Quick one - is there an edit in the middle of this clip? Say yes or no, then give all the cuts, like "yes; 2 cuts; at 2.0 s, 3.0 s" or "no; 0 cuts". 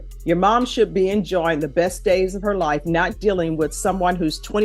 no; 0 cuts